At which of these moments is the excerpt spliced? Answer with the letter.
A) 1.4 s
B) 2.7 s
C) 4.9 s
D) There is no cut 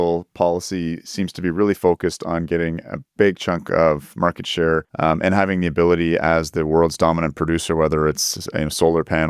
C